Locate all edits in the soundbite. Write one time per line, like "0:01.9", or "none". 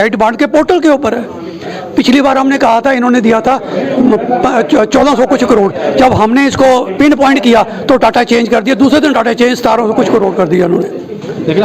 none